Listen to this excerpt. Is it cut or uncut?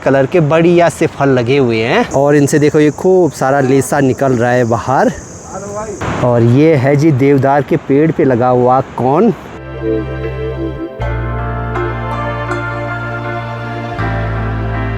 uncut